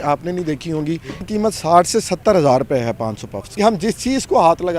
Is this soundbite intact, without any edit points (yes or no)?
no